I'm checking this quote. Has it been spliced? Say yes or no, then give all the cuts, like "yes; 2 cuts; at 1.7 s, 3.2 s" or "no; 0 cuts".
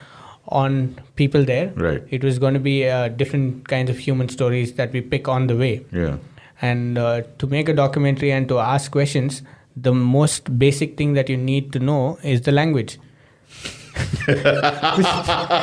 no; 0 cuts